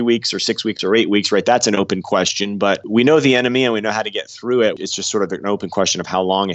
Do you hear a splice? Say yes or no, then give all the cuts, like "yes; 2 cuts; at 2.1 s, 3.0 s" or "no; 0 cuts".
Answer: yes; 1 cut; at 4.9 s